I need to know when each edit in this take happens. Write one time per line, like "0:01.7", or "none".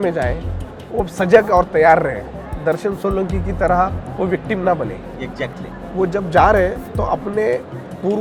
none